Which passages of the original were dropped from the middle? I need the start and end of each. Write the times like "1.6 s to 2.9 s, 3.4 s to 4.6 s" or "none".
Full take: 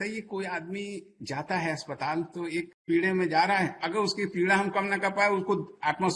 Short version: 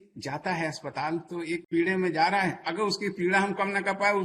2.7 s to 2.8 s